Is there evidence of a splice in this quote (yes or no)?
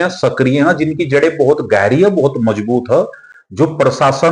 no